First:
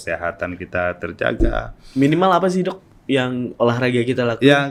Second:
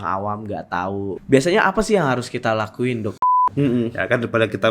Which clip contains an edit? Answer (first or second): second